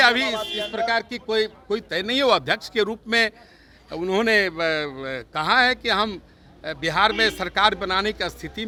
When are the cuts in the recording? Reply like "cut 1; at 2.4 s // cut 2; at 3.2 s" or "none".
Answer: none